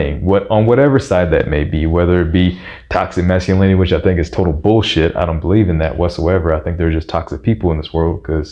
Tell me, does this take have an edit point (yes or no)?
no